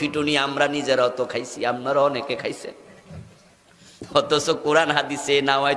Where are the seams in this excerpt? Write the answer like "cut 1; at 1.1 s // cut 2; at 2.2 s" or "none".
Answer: none